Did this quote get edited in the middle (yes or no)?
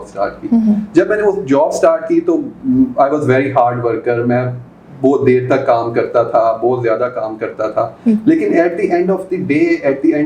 no